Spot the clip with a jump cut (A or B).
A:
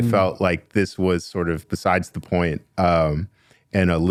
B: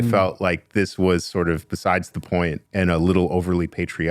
B